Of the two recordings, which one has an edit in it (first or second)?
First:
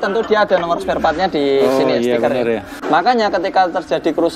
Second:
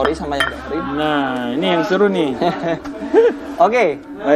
first